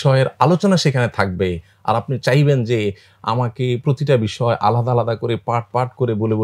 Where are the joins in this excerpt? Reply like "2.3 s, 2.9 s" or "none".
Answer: none

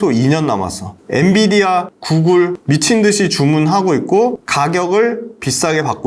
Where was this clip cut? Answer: none

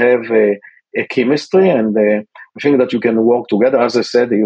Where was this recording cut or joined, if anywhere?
none

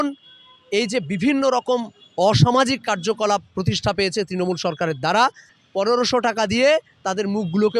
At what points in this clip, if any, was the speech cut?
5.6 s

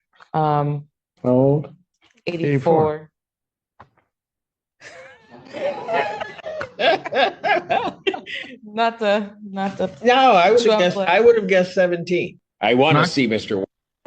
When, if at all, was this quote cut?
12.4 s

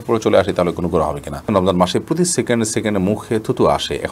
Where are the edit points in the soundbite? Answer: 1.4 s

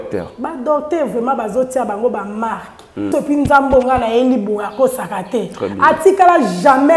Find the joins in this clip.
3.1 s

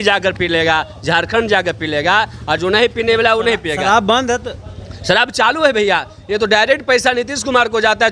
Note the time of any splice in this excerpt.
none

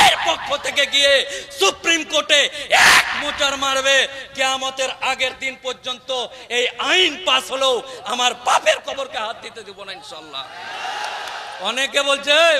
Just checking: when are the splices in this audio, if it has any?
11.5 s

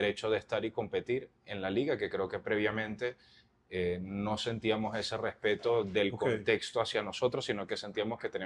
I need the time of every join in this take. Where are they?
none

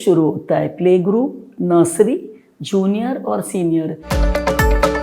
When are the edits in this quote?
4.1 s

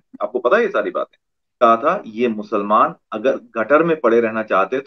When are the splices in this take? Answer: 1.6 s

